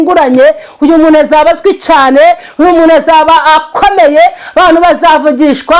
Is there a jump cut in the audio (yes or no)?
no